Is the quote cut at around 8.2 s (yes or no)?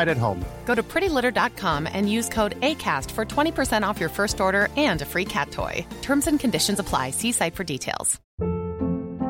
yes